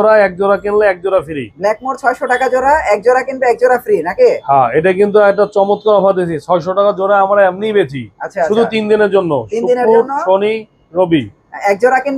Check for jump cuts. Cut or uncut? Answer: uncut